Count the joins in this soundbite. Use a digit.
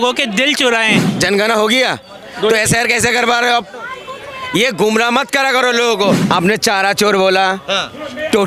2